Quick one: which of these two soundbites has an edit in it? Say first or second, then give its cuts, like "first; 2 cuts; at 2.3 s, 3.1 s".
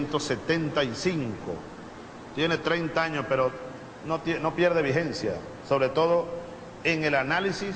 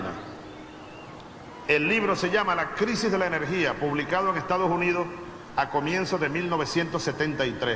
first; 1 cut; at 6.8 s